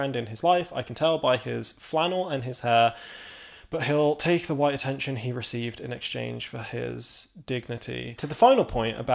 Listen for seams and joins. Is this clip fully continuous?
no; 1 cut; at 8.2 s

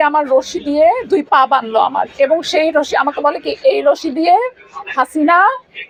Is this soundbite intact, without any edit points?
yes; 0 cuts

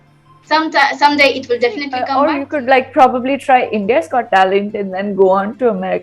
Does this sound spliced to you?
yes; 1 cut; at 2.0 s

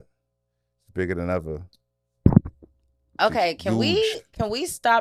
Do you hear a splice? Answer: no; 0 cuts

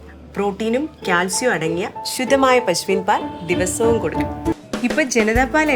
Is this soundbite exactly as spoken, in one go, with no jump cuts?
no; 1 cut; at 4.5 s

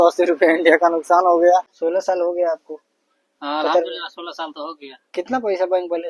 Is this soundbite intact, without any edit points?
no; 1 cut; at 1.8 s

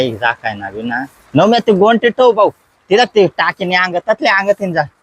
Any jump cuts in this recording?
yes; 1 cut; at 1.1 s

